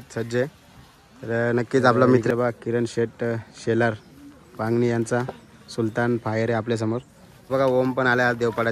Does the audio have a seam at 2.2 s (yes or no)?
yes